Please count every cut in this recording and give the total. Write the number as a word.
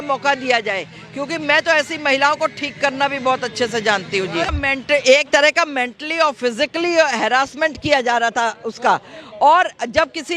one